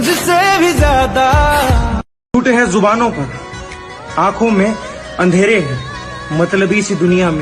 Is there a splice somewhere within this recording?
yes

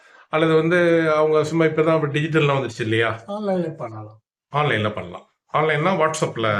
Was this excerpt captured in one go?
yes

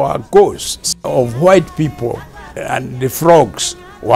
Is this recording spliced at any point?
yes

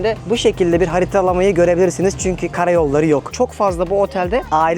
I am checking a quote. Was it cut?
yes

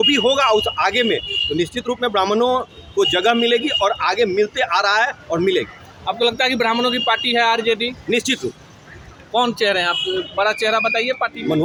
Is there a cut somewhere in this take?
no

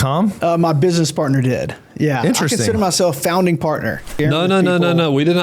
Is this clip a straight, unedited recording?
no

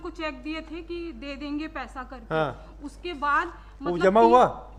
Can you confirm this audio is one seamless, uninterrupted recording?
yes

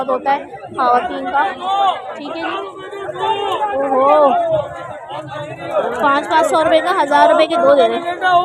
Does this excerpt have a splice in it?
no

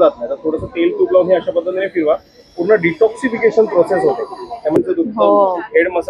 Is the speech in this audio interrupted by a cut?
yes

